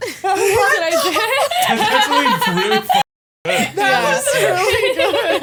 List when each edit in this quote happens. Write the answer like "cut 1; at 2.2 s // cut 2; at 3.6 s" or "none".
none